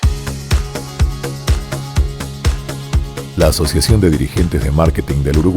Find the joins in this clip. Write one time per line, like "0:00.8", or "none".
0:02.9